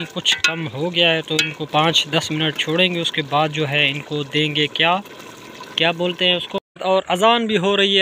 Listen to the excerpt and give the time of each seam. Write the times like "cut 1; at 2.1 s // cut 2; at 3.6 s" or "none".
cut 1; at 6.8 s